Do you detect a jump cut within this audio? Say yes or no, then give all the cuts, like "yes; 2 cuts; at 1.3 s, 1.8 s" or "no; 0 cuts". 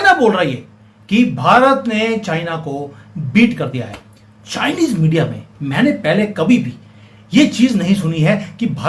no; 0 cuts